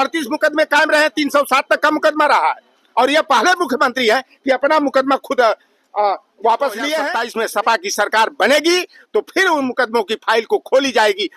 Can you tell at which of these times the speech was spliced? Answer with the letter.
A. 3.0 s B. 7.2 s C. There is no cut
B